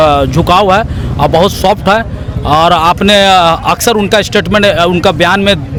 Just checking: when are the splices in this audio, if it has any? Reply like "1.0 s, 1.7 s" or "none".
none